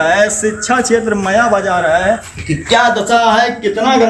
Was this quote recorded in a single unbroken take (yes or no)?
no